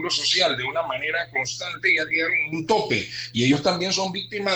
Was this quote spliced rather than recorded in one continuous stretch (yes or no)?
no